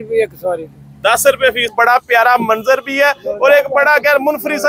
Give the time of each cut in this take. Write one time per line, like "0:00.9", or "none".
0:01.7